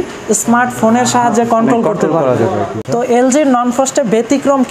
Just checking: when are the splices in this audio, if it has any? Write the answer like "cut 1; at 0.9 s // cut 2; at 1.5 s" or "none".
cut 1; at 2.8 s

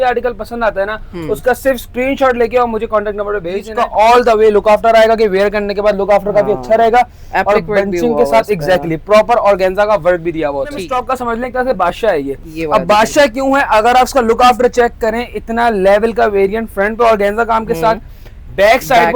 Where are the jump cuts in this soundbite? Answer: cut 1; at 3.6 s // cut 2; at 10.9 s

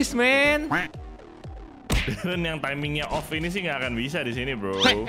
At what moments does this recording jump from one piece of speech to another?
cut 1; at 1.9 s

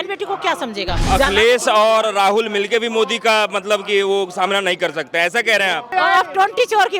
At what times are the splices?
cut 1; at 1.0 s // cut 2; at 5.9 s

